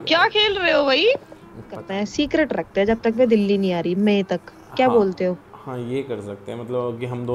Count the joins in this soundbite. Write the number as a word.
one